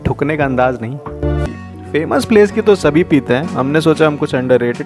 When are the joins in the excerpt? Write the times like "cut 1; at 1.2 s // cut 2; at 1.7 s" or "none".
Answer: cut 1; at 1.4 s